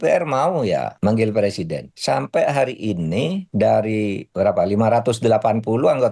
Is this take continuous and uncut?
no; 4 cuts; at 0.9 s, 1.9 s, 3.4 s, 4.2 s

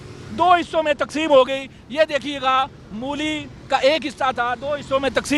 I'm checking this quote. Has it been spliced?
no; 0 cuts

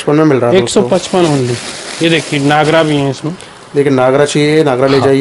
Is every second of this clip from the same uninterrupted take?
yes; 0 cuts

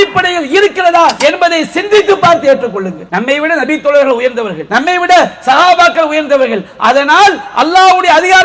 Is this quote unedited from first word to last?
no; 3 cuts; at 1.2 s, 3.0 s, 4.6 s

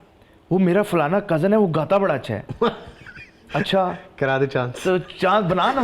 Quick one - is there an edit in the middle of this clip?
no; 0 cuts

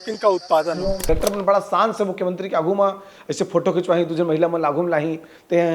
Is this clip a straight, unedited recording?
no; 1 cut; at 1.1 s

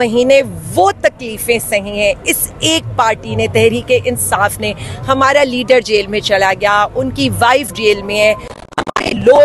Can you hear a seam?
no; 0 cuts

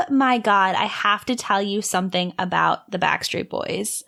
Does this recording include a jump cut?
no; 0 cuts

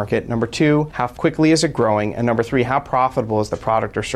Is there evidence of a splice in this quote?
yes; 1 cut; at 1.0 s

